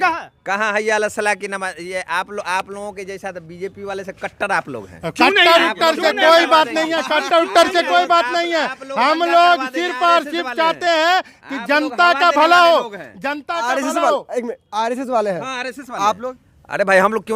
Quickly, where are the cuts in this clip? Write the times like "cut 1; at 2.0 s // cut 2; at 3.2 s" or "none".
none